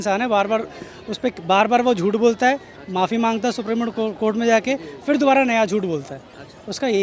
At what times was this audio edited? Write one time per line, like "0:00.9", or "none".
none